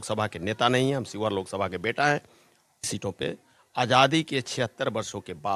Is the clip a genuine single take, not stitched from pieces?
no; 1 cut; at 2.9 s

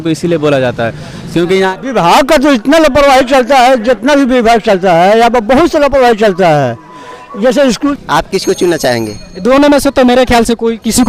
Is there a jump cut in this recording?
yes; 2 cuts; at 1.7 s, 8.0 s

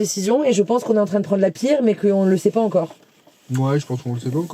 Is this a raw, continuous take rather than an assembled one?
yes; 0 cuts

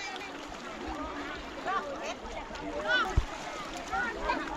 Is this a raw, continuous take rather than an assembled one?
no; 1 cut; at 3.0 s

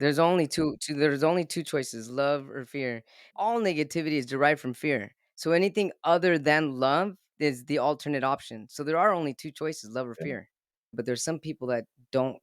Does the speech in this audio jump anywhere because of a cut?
yes; 3 cuts; at 3.3 s, 7.3 s, 10.9 s

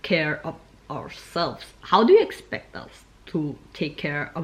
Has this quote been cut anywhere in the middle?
no; 0 cuts

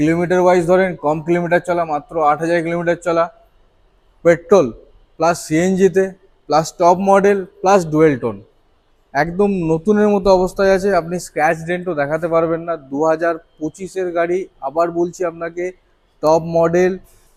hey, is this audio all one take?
yes; 0 cuts

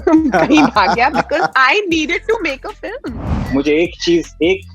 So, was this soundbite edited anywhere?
yes; 1 cut; at 3.3 s

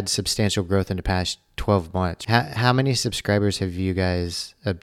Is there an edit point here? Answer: yes; 1 cut; at 2.2 s

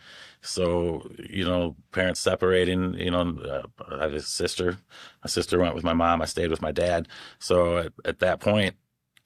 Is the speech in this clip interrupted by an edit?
no; 0 cuts

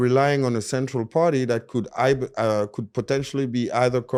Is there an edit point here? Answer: no; 0 cuts

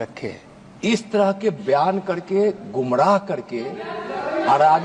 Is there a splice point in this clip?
no; 0 cuts

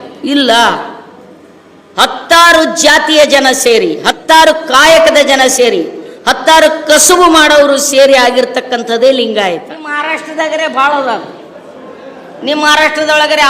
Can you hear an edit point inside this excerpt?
yes; 1 cut; at 9.9 s

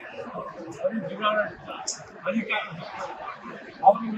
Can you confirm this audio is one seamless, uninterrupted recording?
yes; 0 cuts

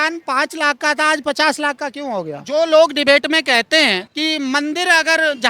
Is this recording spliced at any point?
yes; 2 cuts; at 2.4 s, 4.1 s

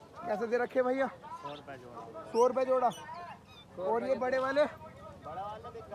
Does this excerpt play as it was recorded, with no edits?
yes; 0 cuts

